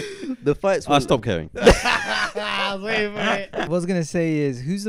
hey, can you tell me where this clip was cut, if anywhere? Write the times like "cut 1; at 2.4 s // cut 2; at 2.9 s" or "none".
cut 1; at 3.7 s